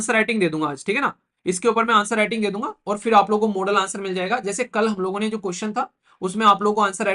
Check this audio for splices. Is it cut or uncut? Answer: uncut